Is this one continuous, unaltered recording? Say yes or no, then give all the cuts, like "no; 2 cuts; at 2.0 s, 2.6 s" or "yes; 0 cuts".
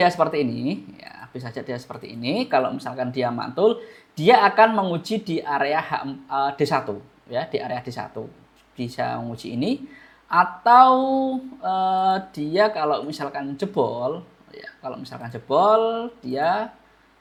yes; 0 cuts